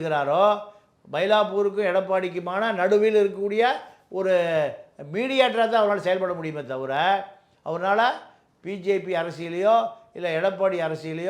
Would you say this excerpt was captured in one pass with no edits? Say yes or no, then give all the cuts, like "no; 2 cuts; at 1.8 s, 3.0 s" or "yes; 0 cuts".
yes; 0 cuts